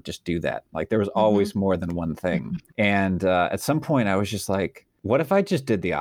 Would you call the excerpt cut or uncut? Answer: cut